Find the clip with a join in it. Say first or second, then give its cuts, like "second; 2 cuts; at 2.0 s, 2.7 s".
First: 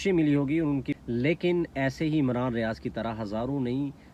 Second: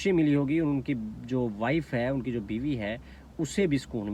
first; 1 cut; at 0.9 s